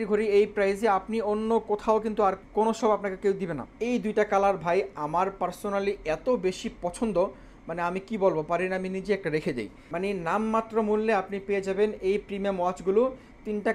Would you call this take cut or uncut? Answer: cut